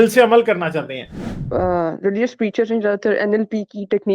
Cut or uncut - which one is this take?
cut